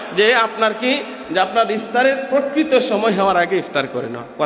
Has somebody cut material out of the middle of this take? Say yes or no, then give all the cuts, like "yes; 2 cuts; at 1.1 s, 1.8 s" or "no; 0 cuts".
no; 0 cuts